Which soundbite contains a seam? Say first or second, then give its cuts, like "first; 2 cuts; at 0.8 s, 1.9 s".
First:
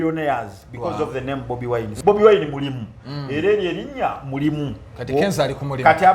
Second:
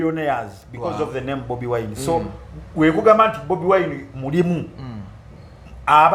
first; 1 cut; at 1.9 s